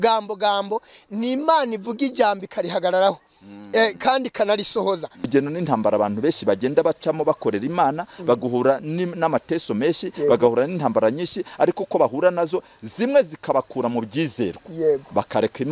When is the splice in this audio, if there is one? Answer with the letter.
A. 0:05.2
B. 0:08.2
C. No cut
A